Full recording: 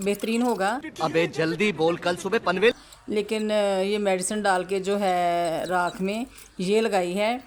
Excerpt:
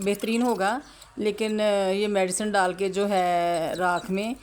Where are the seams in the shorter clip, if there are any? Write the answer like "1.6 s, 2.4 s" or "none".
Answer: 0.9 s